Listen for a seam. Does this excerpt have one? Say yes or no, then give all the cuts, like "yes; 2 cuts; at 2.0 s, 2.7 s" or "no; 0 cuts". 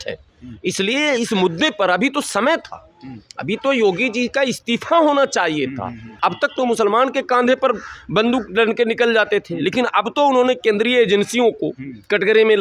yes; 1 cut; at 6.0 s